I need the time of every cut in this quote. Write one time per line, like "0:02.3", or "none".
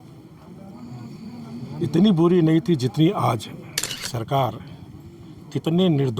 0:04.0